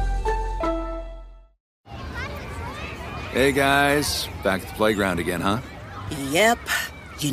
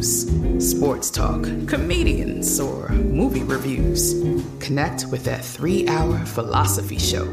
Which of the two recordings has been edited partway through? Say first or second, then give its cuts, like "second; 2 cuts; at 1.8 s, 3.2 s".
first; 1 cut; at 1.7 s